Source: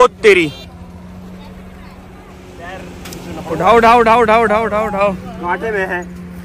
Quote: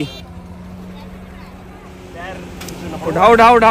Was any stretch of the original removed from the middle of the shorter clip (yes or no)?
no